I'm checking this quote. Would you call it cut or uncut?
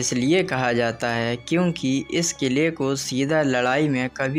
uncut